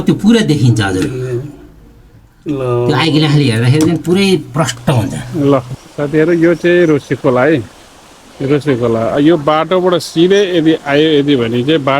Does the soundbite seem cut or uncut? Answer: cut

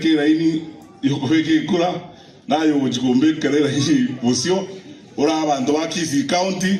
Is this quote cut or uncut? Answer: uncut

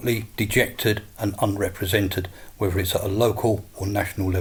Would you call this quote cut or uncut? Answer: uncut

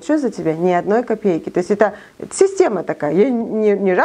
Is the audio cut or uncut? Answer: uncut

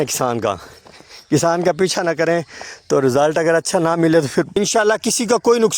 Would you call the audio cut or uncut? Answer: cut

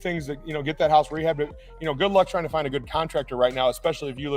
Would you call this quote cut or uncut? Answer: uncut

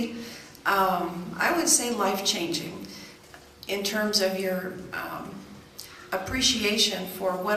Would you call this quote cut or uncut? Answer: uncut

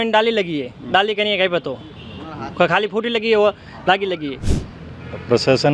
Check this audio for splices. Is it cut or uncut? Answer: cut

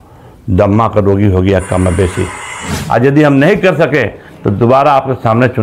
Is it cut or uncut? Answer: cut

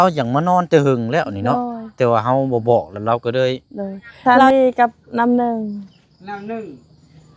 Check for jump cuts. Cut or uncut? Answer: cut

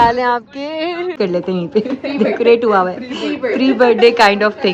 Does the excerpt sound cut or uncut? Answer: cut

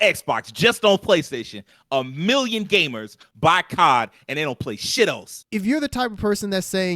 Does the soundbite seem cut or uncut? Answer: cut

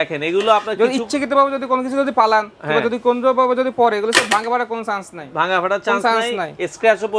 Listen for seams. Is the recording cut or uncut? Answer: uncut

